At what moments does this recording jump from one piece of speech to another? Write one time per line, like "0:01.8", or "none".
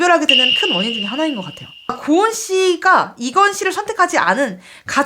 0:02.0